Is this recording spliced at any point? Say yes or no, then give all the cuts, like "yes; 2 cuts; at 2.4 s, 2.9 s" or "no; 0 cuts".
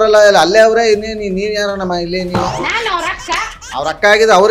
yes; 2 cuts; at 2.5 s, 3.6 s